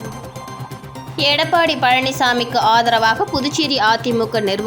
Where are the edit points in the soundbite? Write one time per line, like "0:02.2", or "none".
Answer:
none

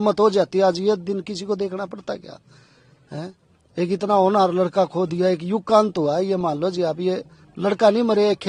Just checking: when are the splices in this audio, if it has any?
none

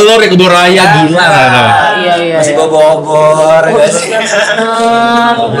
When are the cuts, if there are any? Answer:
none

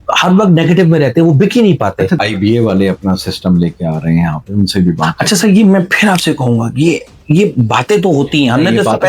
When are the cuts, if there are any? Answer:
0:02.2

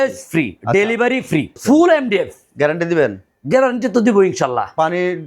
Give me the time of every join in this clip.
0:01.5

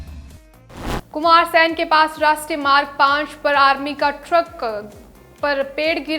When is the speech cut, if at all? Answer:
0:01.0

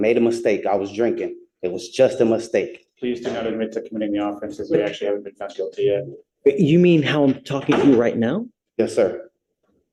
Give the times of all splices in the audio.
none

